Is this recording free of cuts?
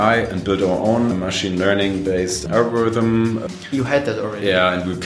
no; 3 cuts; at 1.1 s, 2.4 s, 3.4 s

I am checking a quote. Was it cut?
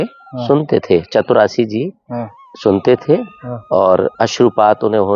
no; 0 cuts

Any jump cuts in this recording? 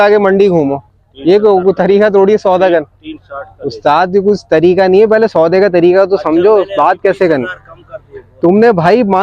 no; 0 cuts

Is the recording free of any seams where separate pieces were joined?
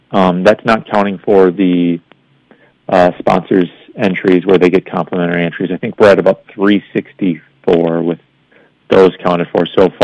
yes; 0 cuts

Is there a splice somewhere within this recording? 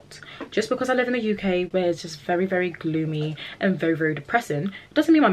yes; 1 cut; at 1.7 s

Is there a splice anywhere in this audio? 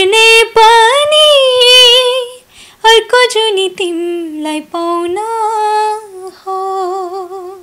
no; 0 cuts

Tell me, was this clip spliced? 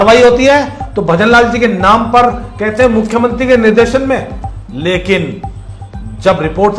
no; 0 cuts

